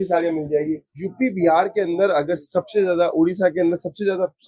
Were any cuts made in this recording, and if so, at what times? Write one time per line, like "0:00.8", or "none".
none

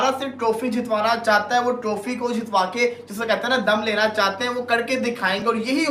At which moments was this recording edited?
none

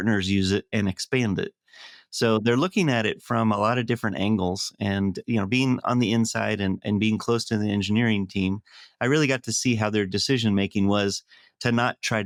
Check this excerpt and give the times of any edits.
none

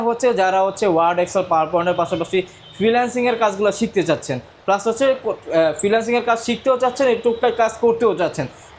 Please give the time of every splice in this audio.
none

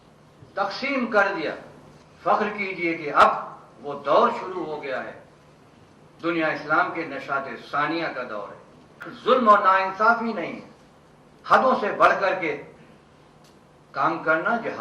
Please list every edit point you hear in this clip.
0:09.0

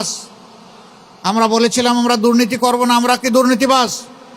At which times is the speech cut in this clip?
none

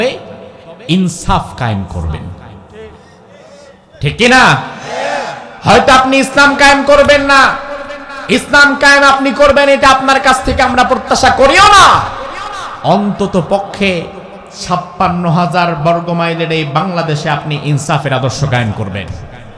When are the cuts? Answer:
none

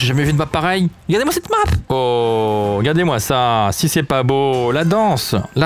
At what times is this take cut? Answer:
0:01.8

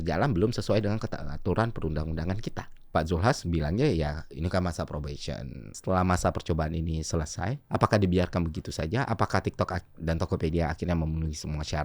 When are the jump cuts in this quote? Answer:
0:02.9
0:05.8
0:07.6

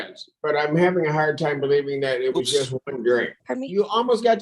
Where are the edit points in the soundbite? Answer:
0:03.4

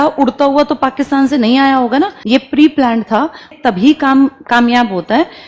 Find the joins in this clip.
none

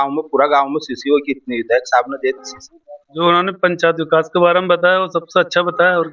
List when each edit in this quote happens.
none

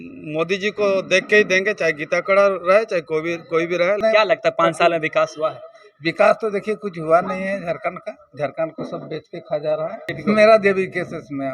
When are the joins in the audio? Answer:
0:04.0
0:10.1

